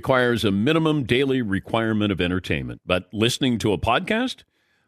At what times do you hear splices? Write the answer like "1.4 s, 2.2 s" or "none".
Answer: none

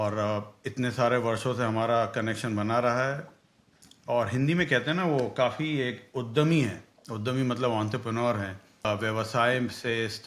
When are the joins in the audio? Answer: 8.8 s

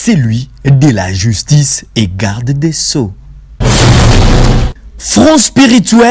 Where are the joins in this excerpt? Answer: 3.6 s, 4.9 s

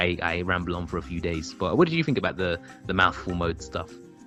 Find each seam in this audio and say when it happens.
none

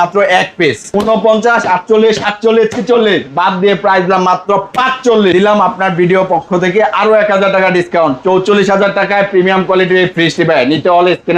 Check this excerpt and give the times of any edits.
0.8 s, 5.3 s

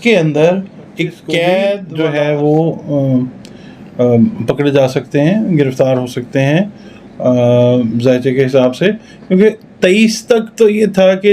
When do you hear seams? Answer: 1.9 s

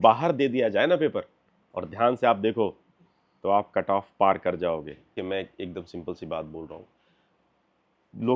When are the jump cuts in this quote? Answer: 5.2 s

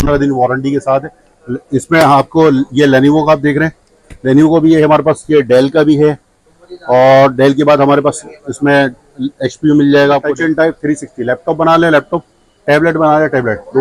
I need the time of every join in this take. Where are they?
10.3 s

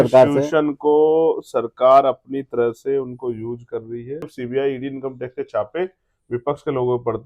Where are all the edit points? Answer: 4.3 s

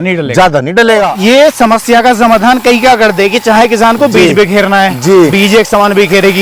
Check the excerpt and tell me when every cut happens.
1.1 s

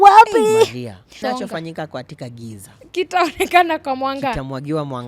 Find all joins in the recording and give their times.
1.2 s

